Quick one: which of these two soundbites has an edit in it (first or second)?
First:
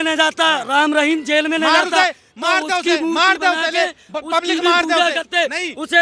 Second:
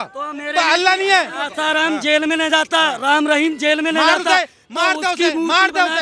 second